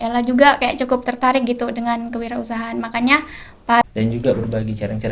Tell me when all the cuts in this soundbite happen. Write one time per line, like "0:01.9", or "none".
0:03.8